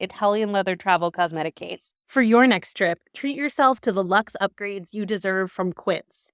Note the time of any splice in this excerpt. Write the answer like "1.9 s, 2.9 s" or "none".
none